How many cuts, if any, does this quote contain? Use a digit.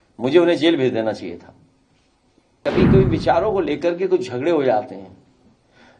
1